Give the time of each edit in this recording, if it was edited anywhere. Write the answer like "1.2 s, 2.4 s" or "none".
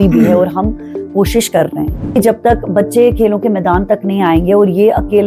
2.2 s